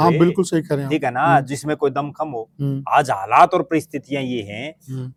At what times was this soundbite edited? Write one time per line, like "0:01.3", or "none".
none